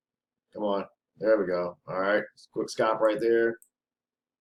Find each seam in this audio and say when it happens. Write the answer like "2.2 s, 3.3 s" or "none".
none